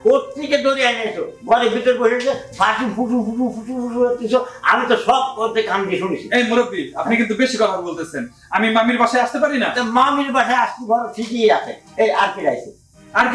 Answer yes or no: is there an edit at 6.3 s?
no